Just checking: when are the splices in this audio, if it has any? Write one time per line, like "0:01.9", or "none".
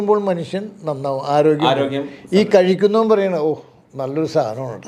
none